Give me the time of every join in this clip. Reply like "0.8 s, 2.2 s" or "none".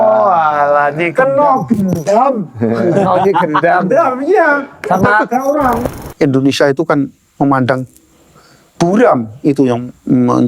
5.8 s